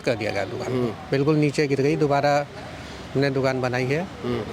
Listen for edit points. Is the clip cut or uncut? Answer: uncut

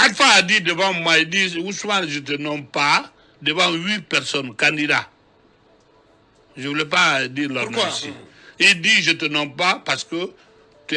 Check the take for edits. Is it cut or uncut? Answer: uncut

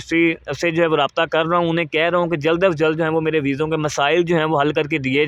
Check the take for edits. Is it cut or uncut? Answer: uncut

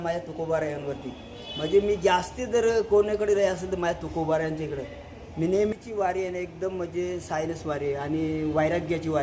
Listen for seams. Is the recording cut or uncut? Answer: cut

